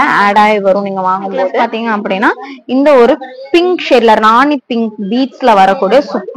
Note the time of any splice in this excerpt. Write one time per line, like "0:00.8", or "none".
0:01.5